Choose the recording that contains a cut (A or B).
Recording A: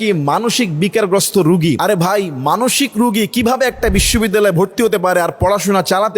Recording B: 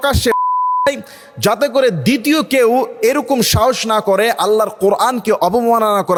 A